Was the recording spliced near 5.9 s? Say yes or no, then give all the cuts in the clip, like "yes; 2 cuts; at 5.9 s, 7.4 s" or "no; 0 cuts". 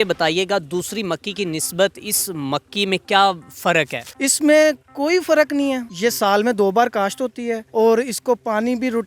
yes; 3 cuts; at 4.0 s, 5.9 s, 7.6 s